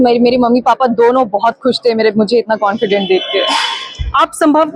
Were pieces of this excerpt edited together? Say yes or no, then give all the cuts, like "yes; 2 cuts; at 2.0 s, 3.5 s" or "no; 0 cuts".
no; 0 cuts